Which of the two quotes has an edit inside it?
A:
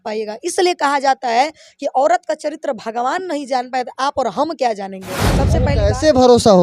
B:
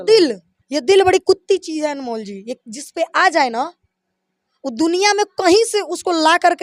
A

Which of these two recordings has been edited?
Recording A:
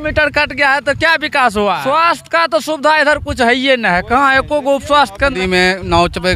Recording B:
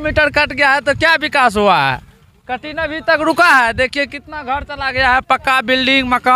A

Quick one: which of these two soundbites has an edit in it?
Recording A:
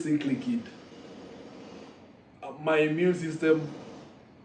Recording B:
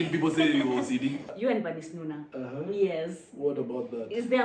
B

